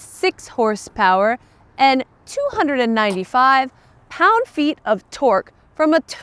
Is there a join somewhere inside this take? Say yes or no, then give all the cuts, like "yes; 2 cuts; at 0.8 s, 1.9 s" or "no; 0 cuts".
no; 0 cuts